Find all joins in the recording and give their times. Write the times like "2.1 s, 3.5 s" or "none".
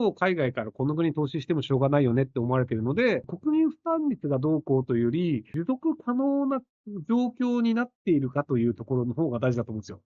3.3 s, 5.5 s